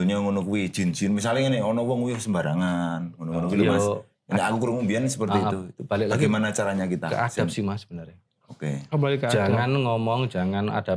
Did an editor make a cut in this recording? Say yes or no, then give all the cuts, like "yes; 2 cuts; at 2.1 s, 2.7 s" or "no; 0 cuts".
no; 0 cuts